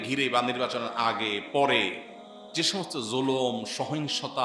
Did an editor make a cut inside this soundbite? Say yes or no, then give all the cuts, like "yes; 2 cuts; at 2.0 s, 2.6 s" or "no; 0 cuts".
no; 0 cuts